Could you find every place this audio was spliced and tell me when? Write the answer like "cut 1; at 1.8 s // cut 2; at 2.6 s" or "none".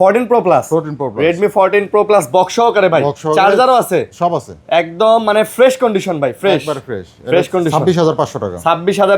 none